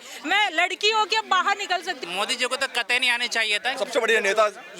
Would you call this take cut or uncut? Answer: cut